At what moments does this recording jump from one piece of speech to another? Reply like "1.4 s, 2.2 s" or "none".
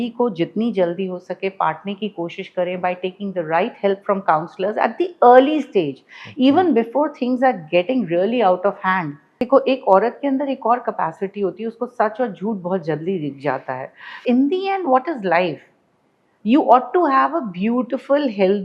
9.3 s, 14.2 s